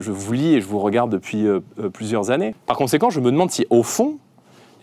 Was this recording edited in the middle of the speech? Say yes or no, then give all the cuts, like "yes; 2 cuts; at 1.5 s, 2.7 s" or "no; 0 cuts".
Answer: yes; 1 cut; at 2.6 s